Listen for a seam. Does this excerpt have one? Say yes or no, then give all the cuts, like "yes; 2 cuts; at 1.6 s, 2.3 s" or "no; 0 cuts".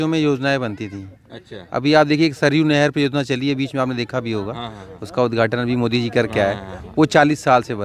no; 0 cuts